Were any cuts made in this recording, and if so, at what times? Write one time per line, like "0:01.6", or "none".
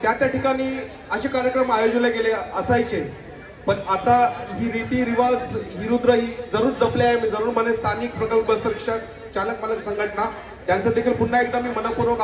none